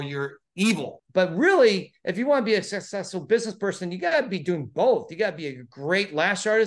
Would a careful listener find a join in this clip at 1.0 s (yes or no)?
yes